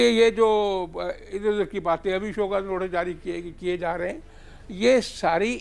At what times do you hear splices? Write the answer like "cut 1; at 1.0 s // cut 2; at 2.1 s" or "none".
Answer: none